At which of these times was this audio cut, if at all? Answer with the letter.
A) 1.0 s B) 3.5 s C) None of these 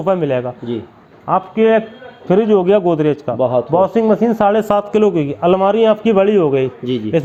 C